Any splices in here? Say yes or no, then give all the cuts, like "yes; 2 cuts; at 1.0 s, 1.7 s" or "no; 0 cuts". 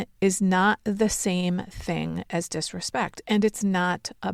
no; 0 cuts